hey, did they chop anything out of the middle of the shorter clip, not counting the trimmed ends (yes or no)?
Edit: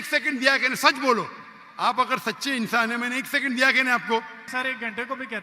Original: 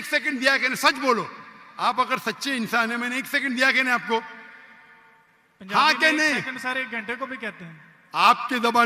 yes